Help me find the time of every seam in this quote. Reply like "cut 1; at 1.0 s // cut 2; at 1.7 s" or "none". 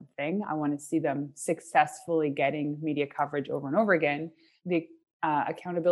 cut 1; at 4.6 s